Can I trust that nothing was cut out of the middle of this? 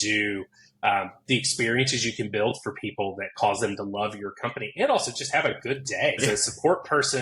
no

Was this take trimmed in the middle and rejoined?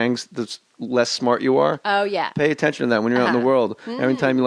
yes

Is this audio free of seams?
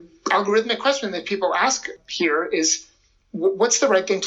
no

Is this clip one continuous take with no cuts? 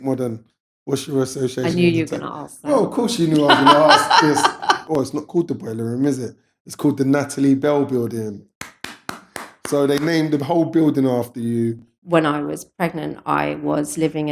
no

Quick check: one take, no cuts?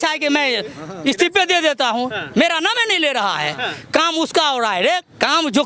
yes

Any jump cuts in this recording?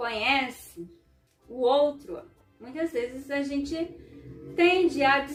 no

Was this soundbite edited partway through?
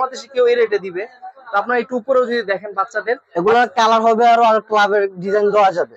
no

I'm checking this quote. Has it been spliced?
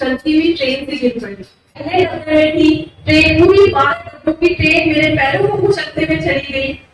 yes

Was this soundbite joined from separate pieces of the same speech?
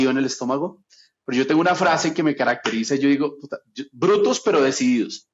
no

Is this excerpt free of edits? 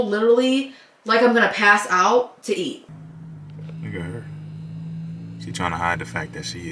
no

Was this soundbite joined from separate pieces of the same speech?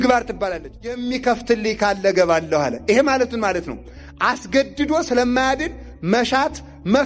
yes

